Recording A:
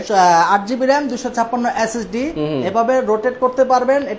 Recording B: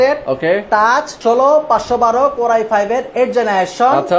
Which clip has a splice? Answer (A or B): B